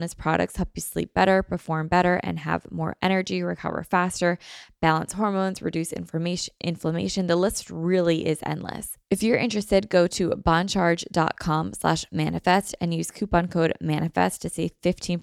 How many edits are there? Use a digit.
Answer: 1